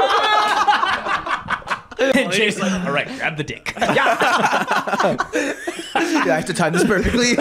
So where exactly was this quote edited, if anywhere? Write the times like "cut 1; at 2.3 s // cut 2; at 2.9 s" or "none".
cut 1; at 2.1 s